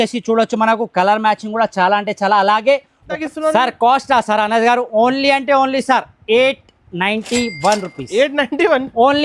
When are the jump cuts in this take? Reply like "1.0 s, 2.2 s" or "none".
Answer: 3.2 s